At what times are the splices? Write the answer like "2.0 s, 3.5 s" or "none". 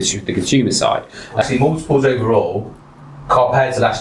1.4 s